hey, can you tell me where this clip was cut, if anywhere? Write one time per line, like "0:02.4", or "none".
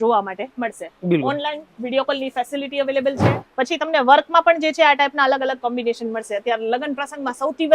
0:03.4